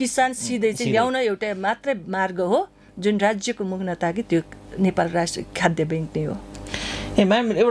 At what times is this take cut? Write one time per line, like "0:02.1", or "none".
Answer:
none